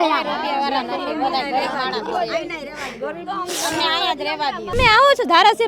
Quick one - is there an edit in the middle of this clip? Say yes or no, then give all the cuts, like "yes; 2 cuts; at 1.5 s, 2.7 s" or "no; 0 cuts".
yes; 1 cut; at 4.7 s